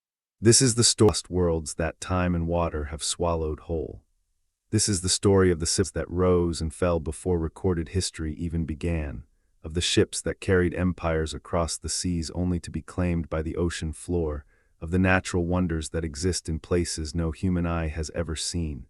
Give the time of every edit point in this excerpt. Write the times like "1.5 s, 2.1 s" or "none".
1.1 s, 5.9 s